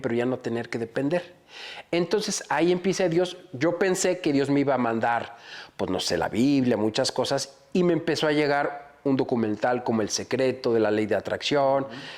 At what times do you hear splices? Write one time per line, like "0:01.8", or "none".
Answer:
none